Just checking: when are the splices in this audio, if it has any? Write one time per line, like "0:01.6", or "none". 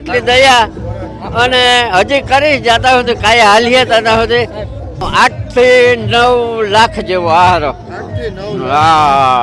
0:05.1